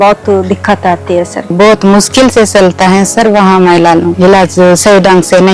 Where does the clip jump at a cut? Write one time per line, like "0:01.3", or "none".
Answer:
0:01.5
0:04.1